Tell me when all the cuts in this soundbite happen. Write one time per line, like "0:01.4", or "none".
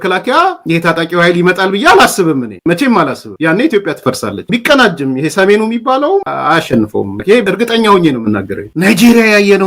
0:04.5
0:06.2
0:07.4
0:08.7

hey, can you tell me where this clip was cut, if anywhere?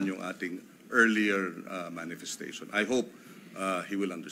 none

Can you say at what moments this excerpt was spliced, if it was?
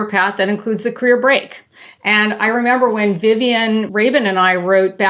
0:03.9

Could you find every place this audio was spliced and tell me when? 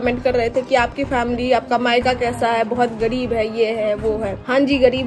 none

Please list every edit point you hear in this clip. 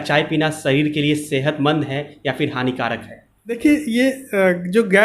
0:03.6

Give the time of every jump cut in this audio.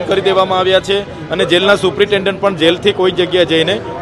none

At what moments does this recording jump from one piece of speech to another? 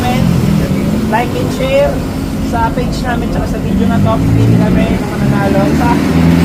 none

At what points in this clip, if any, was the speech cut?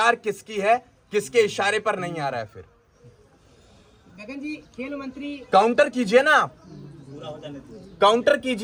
none

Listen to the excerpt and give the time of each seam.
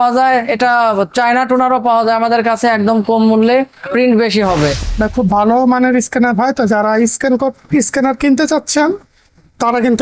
0:04.8

